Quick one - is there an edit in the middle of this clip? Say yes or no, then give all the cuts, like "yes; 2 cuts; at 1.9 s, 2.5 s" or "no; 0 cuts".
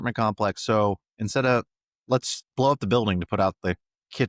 no; 0 cuts